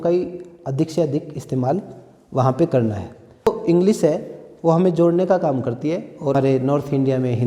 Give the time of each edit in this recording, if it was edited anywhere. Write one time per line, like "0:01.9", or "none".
0:03.5
0:06.3